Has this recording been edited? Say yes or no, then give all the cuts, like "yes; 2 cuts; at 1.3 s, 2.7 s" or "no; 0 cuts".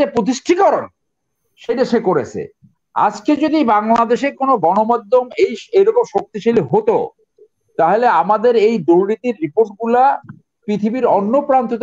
no; 0 cuts